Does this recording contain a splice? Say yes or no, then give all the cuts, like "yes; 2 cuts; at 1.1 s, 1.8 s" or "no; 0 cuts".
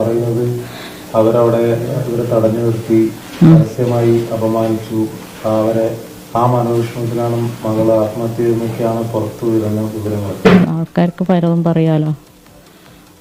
no; 0 cuts